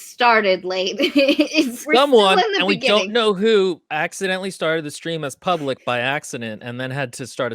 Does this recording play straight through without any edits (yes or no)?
no